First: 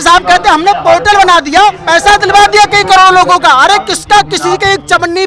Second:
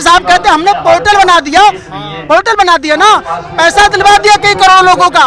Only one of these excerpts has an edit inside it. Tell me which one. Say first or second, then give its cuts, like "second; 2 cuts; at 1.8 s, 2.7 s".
first; 1 cut; at 1.8 s